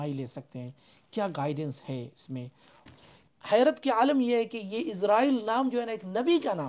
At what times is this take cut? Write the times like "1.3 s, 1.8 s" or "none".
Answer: 2.8 s